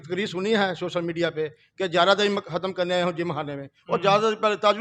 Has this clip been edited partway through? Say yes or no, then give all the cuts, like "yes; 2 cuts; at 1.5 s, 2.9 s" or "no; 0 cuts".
no; 0 cuts